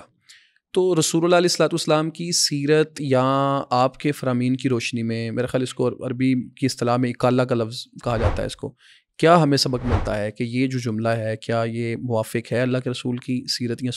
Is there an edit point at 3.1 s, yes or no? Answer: no